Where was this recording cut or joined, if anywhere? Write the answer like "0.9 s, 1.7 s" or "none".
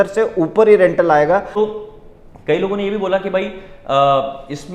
1.5 s